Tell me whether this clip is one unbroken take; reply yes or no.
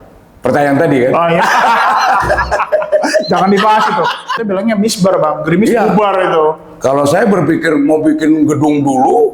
no